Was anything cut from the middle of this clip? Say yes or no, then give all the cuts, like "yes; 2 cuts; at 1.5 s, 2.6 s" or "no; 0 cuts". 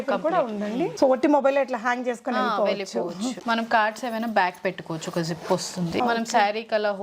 yes; 3 cuts; at 0.9 s, 3.4 s, 6.0 s